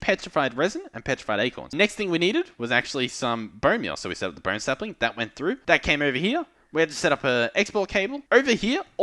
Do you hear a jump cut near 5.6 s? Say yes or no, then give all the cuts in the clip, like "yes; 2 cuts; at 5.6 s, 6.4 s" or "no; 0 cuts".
yes; 3 cuts; at 1.7 s, 5.6 s, 8.2 s